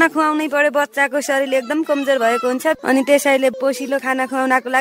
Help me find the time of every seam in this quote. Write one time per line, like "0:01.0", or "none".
0:02.8
0:03.5